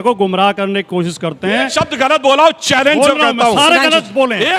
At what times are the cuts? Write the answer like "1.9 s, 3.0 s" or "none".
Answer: none